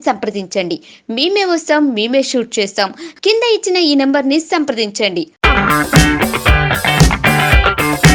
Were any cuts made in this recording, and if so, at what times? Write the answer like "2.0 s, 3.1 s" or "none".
none